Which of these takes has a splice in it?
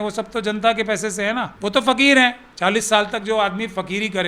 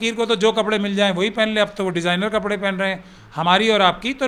first; 1 cut; at 1.5 s

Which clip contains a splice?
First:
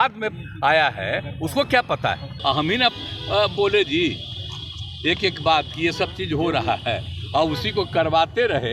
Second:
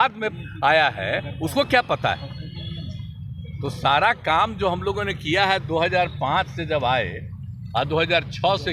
first; 1 cut; at 2.3 s

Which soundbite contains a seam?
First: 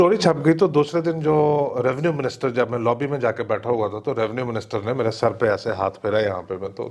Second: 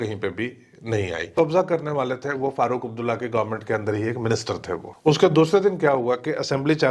second; 2 cuts; at 1.3 s, 4.9 s

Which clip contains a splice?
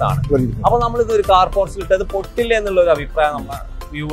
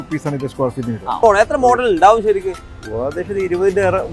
second; 1 cut; at 1.2 s

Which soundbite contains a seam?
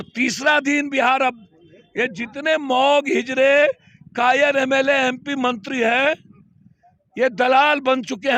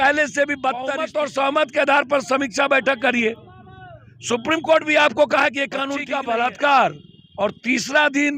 second; 2 cuts; at 1.0 s, 6.0 s

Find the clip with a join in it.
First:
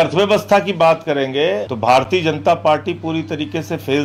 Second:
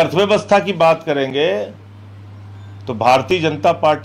first; 1 cut; at 1.7 s

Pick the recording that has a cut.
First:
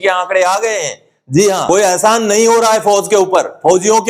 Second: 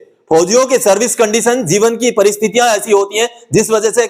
first; 1 cut; at 1.7 s

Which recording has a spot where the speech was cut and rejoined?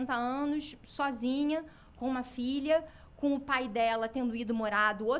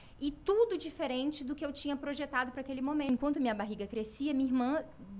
second; 1 cut; at 3.1 s

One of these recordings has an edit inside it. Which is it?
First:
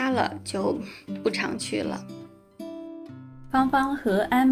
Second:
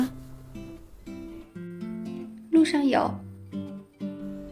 first; 2 cuts; at 2.0 s, 3.5 s

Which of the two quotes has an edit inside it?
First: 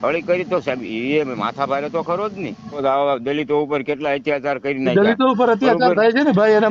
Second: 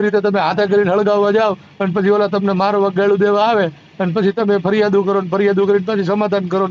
first; 1 cut; at 2.8 s

